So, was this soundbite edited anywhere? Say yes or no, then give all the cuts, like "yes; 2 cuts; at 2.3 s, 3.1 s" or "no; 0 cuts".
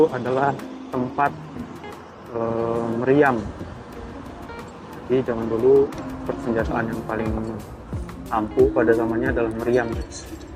no; 0 cuts